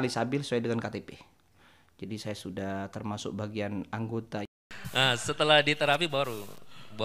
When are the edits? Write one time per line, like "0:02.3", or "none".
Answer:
0:04.4